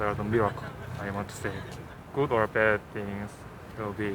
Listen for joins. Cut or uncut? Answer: cut